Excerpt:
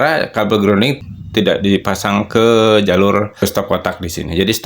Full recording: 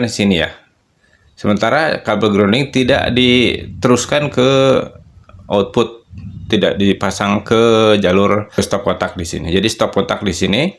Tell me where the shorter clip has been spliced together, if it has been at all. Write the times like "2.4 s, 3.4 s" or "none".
1.0 s